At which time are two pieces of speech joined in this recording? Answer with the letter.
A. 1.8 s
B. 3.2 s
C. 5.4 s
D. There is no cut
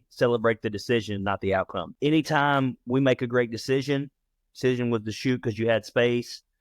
A